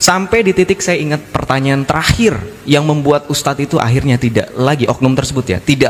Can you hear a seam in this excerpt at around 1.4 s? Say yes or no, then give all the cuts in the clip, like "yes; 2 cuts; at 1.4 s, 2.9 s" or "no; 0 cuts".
no; 0 cuts